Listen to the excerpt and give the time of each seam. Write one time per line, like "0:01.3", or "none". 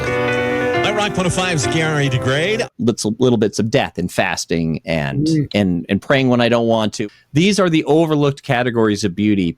0:02.7
0:06.9